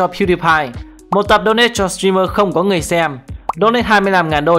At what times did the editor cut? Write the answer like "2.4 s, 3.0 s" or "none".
1.1 s